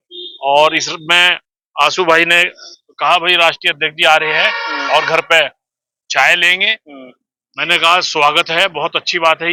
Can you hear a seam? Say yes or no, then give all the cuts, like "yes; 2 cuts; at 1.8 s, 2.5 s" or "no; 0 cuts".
no; 0 cuts